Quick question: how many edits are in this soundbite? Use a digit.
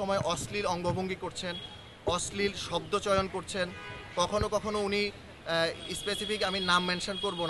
0